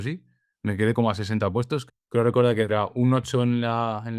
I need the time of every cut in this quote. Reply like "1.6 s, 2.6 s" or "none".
1.9 s